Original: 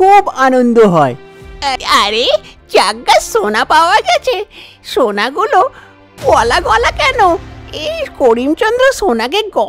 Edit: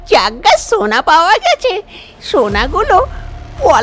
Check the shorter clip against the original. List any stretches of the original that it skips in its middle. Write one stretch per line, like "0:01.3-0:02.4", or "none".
none